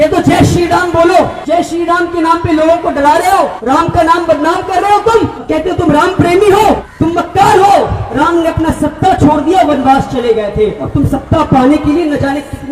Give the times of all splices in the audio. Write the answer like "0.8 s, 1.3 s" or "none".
1.4 s, 3.6 s, 5.4 s, 6.9 s, 8.0 s, 10.8 s